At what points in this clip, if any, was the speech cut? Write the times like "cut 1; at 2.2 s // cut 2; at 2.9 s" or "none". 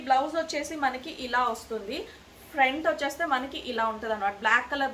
none